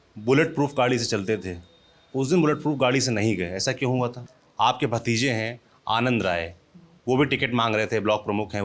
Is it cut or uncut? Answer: cut